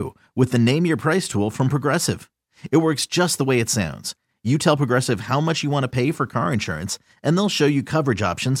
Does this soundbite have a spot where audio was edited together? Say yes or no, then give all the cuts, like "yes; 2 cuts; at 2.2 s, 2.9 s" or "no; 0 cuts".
no; 0 cuts